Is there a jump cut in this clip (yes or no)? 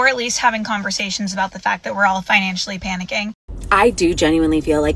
yes